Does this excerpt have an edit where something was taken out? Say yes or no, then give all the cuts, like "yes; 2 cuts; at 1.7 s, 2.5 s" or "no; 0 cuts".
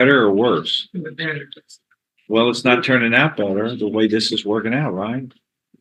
no; 0 cuts